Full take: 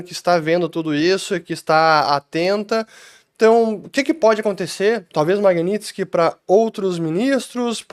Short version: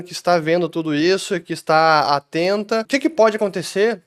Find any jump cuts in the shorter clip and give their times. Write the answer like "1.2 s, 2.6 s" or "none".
2.9 s